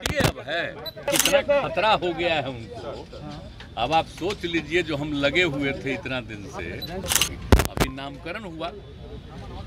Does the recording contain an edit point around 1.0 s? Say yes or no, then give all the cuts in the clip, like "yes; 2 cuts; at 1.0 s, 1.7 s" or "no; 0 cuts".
yes; 2 cuts; at 1.0 s, 7.1 s